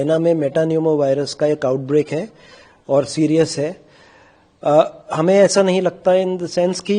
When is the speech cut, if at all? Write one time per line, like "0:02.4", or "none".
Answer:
none

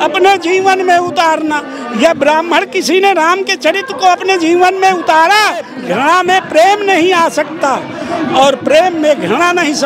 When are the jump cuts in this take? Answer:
0:05.8

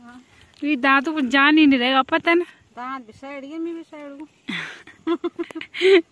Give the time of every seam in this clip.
none

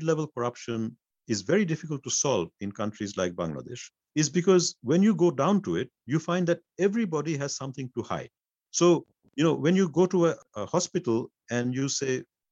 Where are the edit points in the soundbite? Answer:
none

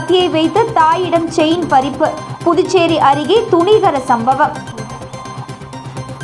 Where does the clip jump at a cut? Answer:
none

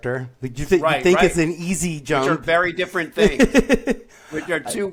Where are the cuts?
none

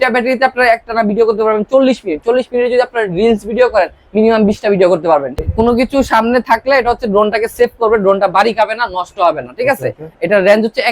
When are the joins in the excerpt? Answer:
0:05.4

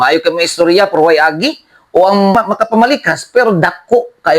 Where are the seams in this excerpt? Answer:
0:02.3

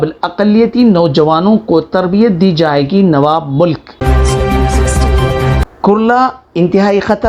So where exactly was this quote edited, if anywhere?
0:03.9
0:05.6

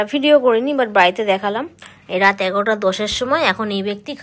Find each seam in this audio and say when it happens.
none

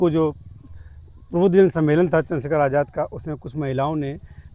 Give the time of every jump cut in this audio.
none

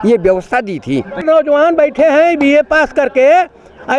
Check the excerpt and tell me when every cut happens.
0:01.2

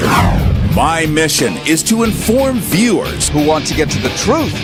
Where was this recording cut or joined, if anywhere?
none

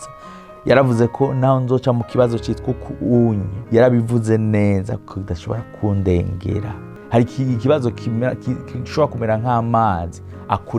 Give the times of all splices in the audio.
0:03.5
0:06.9

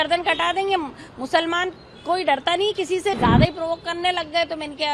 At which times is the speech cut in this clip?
0:03.2

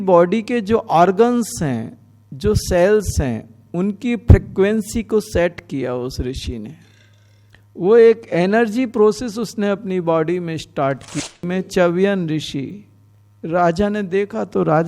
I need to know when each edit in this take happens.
0:11.1

